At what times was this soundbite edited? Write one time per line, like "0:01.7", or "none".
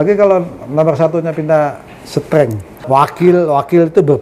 0:02.8

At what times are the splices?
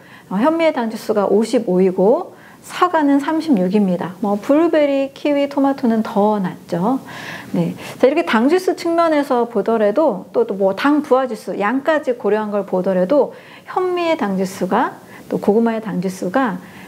none

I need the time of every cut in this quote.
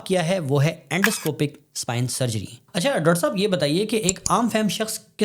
0:02.5

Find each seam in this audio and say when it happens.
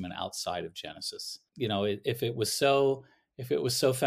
0:01.4

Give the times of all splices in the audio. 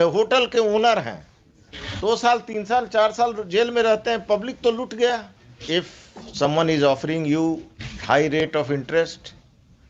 0:05.3

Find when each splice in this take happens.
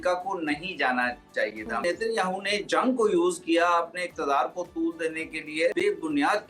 0:01.8
0:05.7

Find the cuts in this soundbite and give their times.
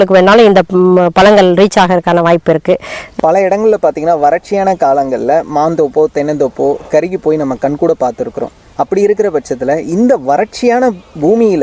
0:03.0

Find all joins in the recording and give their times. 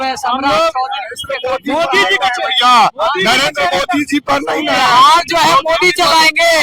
none

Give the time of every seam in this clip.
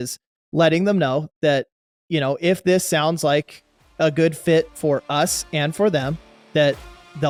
none

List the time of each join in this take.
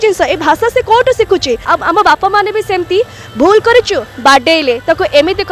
0:01.6

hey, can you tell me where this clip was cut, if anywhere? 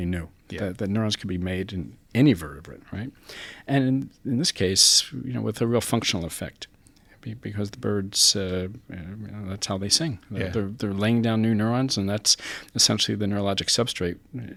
none

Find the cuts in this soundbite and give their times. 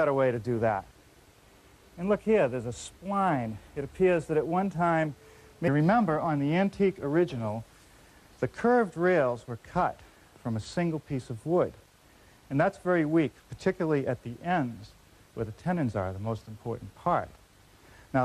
none

